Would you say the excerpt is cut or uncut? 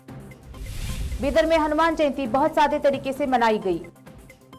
cut